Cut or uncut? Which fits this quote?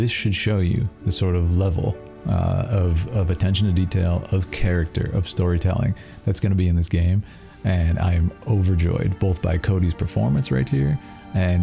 uncut